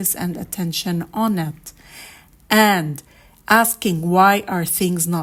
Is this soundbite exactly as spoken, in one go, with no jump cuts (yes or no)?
yes